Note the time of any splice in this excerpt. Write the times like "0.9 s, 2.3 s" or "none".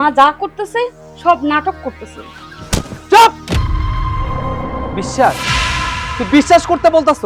none